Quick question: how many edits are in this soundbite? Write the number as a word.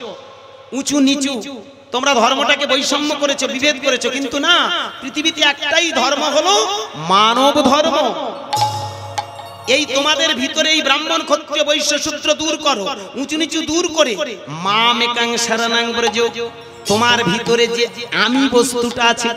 zero